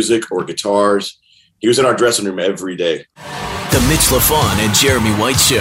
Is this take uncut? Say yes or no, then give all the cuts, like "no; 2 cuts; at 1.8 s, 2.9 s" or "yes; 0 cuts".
no; 1 cut; at 3.1 s